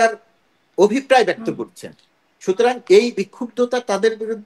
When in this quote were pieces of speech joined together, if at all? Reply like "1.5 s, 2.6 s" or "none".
none